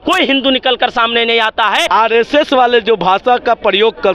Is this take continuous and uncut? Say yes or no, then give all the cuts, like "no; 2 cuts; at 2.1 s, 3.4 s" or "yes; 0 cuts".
no; 1 cut; at 1.9 s